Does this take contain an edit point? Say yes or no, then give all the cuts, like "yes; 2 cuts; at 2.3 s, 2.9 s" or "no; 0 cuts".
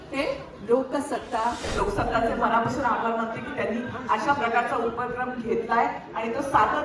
yes; 1 cut; at 1.7 s